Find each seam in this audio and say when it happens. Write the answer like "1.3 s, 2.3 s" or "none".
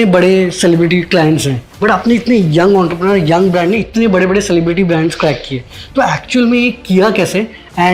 1.6 s